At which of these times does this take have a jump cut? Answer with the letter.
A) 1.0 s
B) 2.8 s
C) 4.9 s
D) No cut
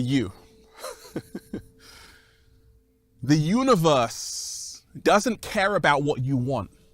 D